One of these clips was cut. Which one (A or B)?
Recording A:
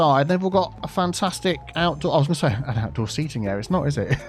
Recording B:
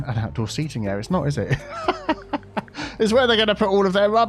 A